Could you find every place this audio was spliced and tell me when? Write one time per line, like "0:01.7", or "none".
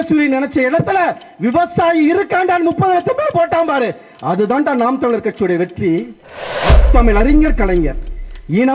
0:06.8